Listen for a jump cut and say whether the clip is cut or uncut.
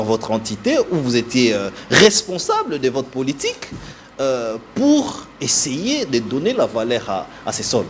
uncut